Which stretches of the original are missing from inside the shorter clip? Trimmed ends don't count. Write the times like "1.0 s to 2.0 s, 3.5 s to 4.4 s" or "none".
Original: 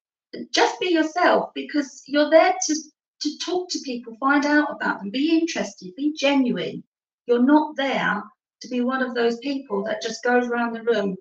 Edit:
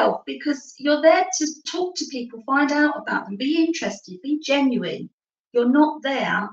2.9 s to 3.4 s